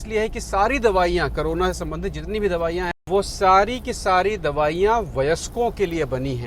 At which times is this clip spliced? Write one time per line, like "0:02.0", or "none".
0:02.9